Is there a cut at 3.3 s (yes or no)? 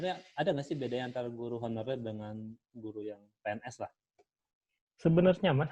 no